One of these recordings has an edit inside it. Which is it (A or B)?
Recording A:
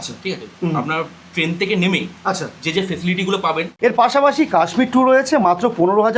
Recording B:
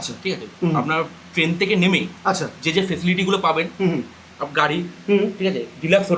A